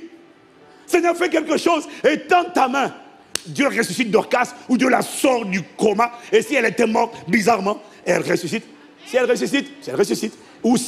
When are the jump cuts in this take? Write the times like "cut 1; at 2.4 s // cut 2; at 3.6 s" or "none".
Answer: none